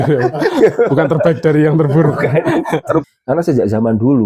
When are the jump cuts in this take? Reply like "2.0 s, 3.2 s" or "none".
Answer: 3.1 s